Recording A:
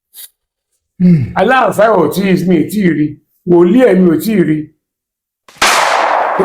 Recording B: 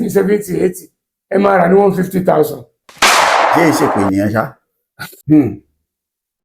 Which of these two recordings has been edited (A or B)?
B